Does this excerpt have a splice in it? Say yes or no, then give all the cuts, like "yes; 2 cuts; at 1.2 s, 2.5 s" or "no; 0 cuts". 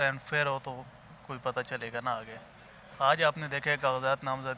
no; 0 cuts